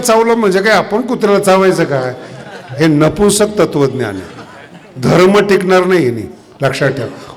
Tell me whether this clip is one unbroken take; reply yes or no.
yes